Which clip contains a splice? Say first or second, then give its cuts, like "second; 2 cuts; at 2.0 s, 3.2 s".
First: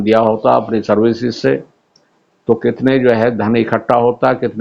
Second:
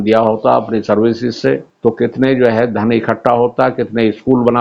second; 1 cut; at 1.7 s